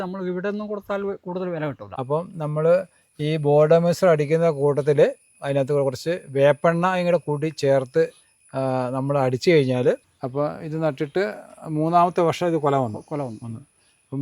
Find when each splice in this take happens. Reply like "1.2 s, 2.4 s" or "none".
1.9 s, 10.2 s